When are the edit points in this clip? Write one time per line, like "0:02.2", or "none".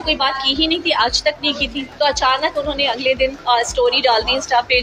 0:01.8
0:03.4